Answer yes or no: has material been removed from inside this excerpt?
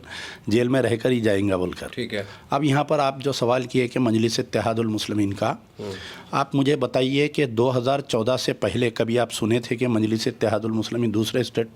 no